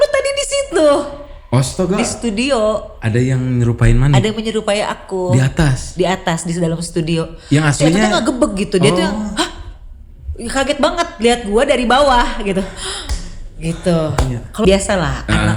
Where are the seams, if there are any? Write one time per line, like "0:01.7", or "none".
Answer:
0:14.6